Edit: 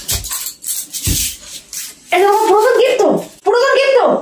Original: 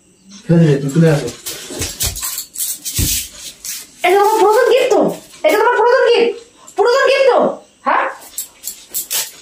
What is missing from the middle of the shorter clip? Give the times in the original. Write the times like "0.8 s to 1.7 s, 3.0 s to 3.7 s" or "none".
5.2 s to 6.6 s